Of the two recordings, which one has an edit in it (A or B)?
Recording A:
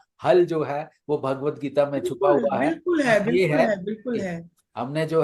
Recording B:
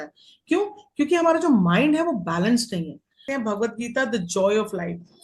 B